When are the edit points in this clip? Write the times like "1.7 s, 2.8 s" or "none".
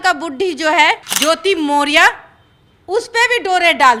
none